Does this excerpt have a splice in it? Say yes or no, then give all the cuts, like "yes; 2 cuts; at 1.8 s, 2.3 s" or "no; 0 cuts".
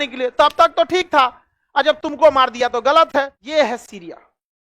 yes; 1 cut; at 3.4 s